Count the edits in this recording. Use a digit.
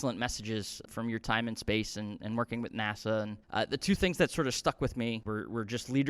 3